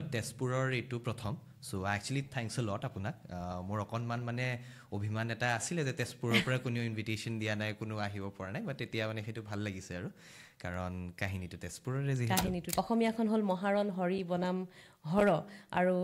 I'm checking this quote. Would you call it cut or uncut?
cut